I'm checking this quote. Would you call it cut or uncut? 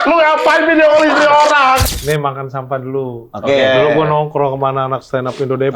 cut